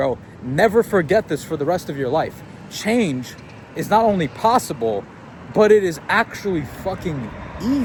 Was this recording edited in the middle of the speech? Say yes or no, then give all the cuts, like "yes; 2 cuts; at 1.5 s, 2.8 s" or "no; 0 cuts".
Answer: no; 0 cuts